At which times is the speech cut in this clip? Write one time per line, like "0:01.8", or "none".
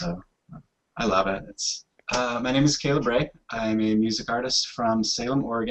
none